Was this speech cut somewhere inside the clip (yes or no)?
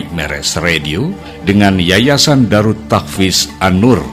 no